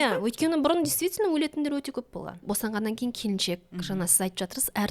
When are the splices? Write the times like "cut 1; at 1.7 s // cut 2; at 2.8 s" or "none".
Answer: cut 1; at 2.4 s